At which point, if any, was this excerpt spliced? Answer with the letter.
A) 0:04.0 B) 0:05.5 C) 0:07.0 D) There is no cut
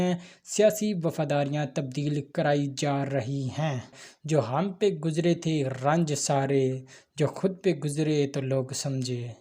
A